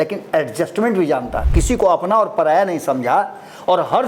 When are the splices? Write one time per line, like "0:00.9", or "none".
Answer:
0:01.4